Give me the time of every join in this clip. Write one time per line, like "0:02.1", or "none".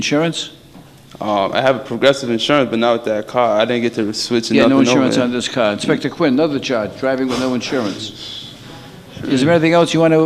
none